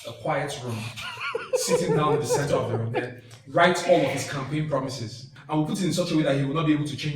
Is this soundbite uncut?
no; 1 cut; at 5.3 s

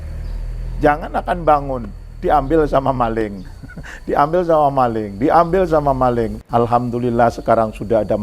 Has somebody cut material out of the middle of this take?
yes; 1 cut; at 6.3 s

